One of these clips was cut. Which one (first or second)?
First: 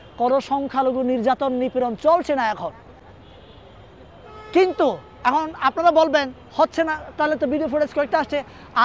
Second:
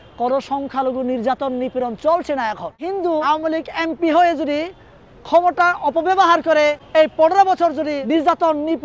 second